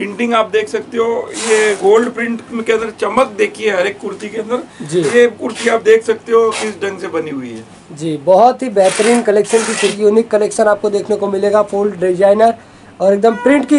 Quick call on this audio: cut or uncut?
cut